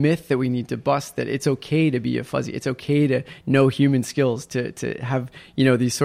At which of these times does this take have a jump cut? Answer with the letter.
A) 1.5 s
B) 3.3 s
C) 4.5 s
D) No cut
D